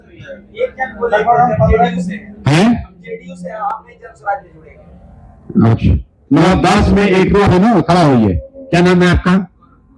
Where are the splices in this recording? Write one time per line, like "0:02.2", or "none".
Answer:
0:07.5